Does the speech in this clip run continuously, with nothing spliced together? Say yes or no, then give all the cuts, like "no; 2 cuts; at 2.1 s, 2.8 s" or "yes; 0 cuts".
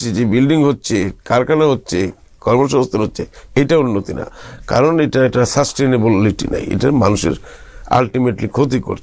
yes; 0 cuts